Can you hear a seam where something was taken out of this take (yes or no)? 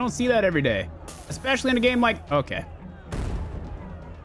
no